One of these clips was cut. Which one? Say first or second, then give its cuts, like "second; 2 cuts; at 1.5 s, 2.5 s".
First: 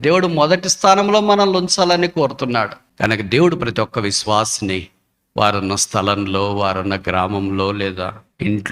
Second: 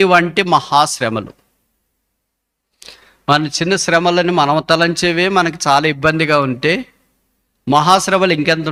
first; 1 cut; at 2.8 s